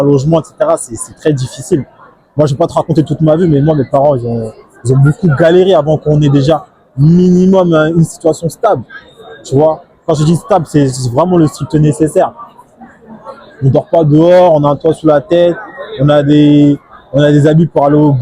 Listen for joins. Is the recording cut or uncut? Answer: uncut